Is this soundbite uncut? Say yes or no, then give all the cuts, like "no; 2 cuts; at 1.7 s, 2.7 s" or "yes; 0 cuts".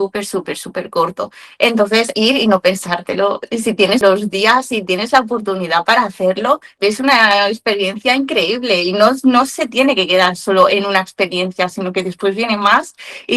no; 3 cuts; at 2.1 s, 4.0 s, 6.7 s